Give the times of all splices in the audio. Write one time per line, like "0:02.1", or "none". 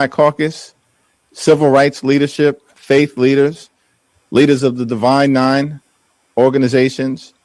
none

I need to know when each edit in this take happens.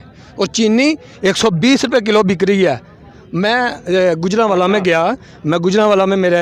none

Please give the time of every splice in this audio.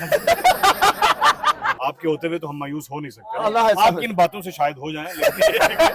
0:01.8

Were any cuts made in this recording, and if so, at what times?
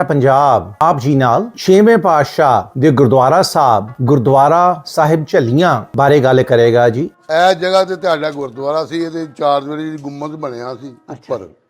0:01.1
0:02.7
0:03.9
0:05.9
0:07.1

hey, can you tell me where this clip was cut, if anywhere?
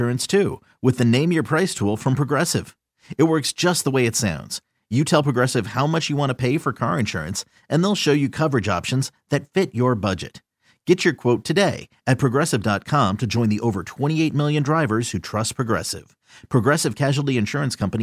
none

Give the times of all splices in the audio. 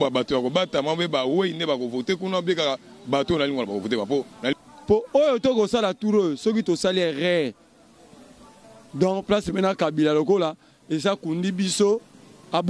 0:04.6

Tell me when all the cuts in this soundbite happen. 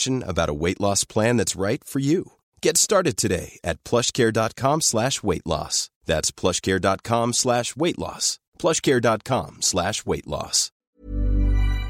0:10.9

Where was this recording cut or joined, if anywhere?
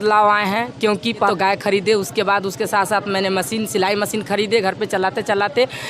0:01.3

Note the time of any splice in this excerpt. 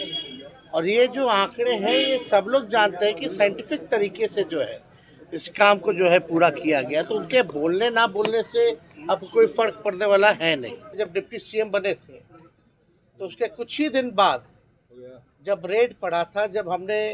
0:11.0

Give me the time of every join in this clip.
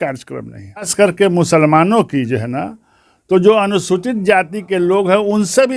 0:00.9

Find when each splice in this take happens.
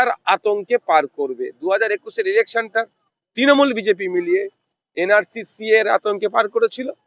none

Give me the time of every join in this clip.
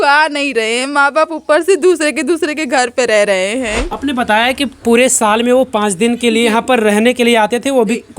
0:03.9

